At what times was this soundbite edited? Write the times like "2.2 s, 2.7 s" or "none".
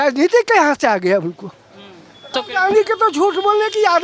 2.3 s